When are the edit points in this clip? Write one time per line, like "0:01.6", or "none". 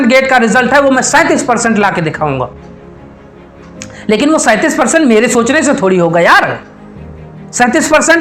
none